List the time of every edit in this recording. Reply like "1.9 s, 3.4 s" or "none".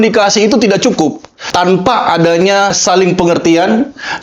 1.5 s, 2.8 s